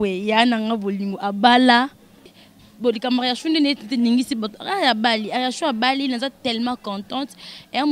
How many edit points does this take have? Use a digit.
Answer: 1